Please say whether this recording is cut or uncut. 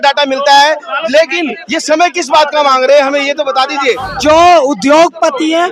cut